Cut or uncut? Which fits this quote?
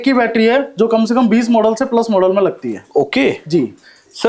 uncut